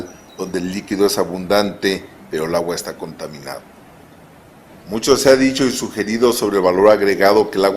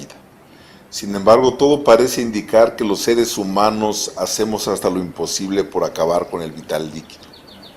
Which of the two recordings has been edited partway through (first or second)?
second